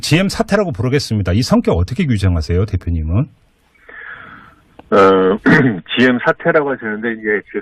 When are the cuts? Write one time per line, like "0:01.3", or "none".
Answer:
0:02.8